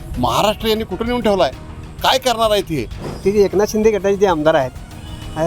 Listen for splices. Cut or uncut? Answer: cut